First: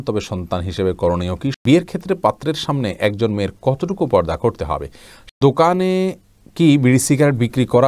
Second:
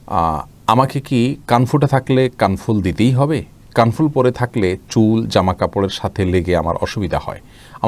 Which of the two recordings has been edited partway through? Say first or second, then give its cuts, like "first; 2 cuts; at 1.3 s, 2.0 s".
first; 2 cuts; at 1.6 s, 5.3 s